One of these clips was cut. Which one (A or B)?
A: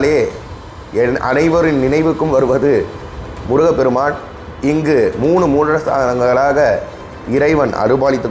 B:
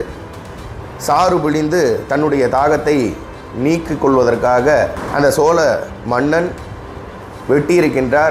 B